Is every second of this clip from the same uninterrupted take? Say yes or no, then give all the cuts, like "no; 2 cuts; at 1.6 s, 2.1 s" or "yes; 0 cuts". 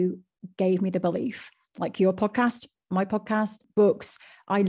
no; 1 cut; at 3.6 s